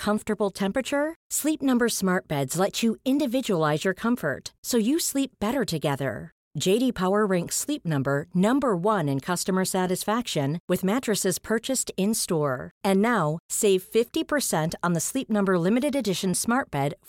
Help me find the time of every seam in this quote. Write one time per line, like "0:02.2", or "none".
none